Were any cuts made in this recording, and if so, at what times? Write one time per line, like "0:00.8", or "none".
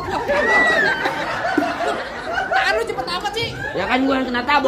none